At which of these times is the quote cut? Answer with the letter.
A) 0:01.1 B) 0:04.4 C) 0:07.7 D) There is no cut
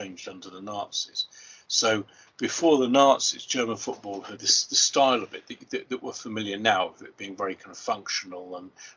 B